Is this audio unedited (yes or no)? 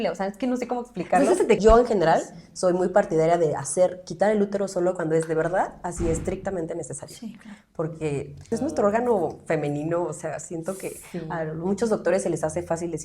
no